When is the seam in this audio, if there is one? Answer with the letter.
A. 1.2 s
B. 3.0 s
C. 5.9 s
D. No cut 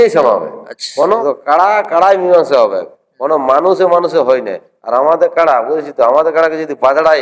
A